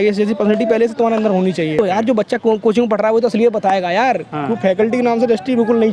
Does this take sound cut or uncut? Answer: cut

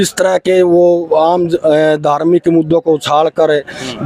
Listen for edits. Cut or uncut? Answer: uncut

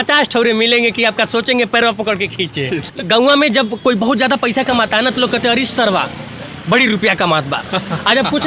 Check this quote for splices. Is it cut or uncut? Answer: cut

